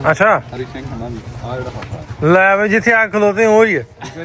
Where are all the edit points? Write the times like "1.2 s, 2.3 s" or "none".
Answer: none

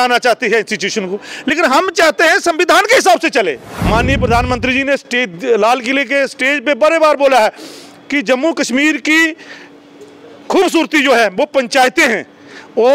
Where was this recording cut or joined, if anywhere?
3.7 s

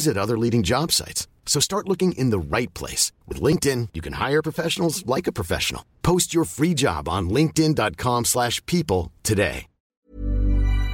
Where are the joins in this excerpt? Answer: 10.0 s

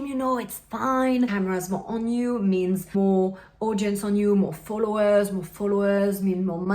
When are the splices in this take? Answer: 1.3 s, 2.9 s

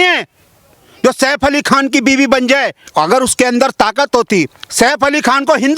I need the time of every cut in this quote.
2.8 s

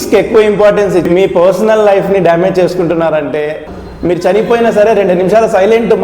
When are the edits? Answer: 1.1 s, 3.6 s

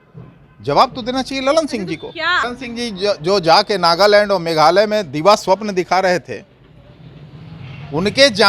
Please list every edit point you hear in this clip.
2.4 s

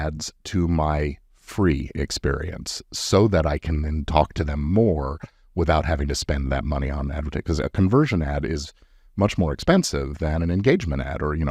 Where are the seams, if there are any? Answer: none

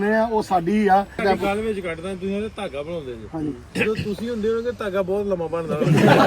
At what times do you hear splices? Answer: 1.2 s

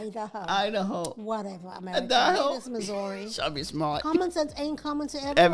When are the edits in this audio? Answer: 2.6 s

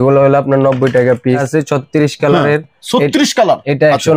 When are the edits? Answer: 1.4 s

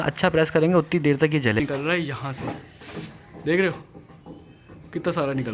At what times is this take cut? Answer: 1.6 s

